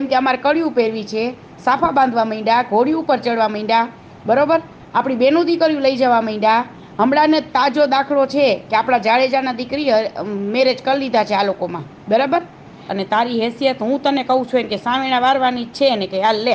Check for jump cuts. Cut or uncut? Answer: cut